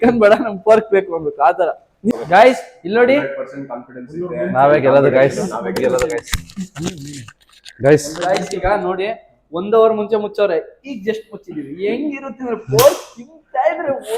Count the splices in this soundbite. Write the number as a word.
one